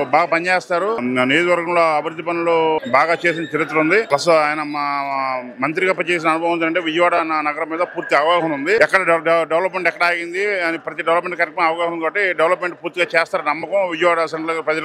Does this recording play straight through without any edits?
no; 4 cuts; at 1.0 s, 2.8 s, 4.1 s, 8.8 s

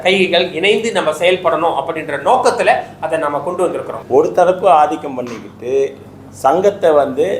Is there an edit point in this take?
yes; 1 cut; at 3.9 s

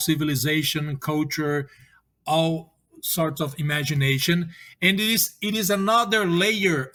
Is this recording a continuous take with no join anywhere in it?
yes; 0 cuts

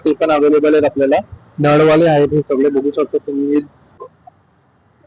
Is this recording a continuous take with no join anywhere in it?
no; 1 cut; at 4.0 s

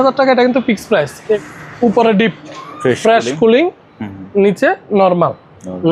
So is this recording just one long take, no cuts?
no; 1 cut; at 1.4 s

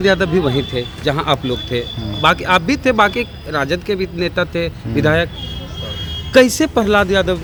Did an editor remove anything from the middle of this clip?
no; 0 cuts

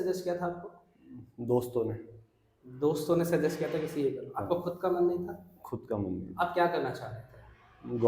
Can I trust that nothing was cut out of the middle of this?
yes; 0 cuts

